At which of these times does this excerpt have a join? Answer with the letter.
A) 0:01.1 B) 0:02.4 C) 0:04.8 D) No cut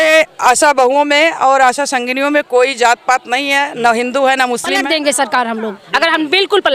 C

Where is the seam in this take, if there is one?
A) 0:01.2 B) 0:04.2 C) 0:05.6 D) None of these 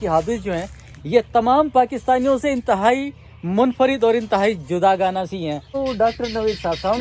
D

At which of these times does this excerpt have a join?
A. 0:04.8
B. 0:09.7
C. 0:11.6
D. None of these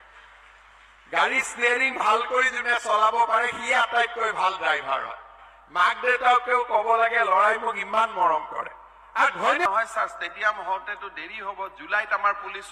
B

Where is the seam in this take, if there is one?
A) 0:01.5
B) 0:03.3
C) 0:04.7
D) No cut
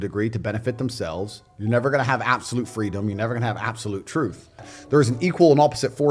C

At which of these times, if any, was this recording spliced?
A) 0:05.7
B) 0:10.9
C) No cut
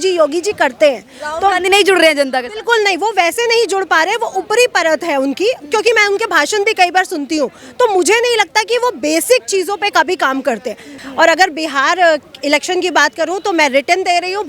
B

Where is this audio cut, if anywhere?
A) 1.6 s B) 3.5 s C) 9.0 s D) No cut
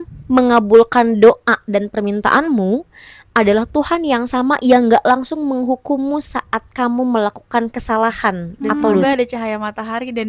C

